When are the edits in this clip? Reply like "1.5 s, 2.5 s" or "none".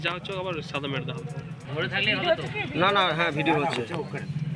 1.6 s